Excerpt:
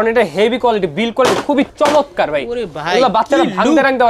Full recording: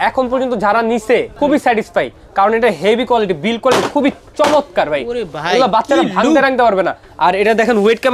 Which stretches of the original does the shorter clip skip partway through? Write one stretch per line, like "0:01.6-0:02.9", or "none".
0:04.2-0:04.3